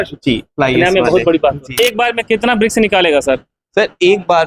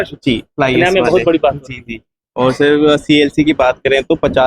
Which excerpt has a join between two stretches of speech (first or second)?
first